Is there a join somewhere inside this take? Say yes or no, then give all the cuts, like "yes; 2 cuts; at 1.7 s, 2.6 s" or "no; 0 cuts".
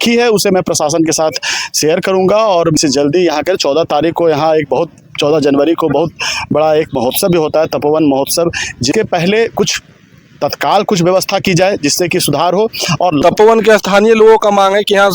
yes; 3 cuts; at 2.8 s, 8.9 s, 13.2 s